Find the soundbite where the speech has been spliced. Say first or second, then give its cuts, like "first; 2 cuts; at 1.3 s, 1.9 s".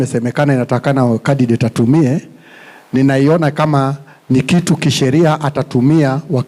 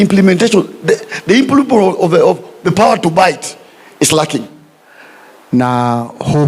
second; 1 cut; at 4.6 s